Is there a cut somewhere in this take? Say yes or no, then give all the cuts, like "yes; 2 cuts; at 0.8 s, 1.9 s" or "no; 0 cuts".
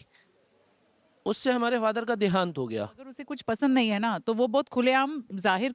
yes; 1 cut; at 3.3 s